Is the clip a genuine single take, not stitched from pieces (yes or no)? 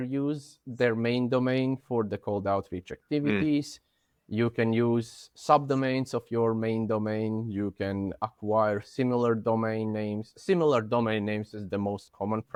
yes